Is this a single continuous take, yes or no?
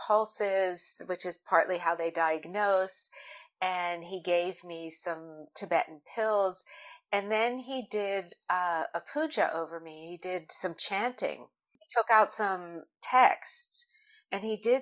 yes